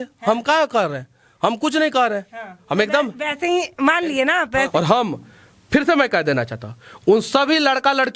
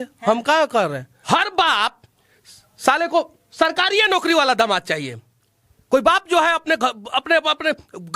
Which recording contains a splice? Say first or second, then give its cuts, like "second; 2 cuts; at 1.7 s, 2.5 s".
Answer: second; 1 cut; at 1.1 s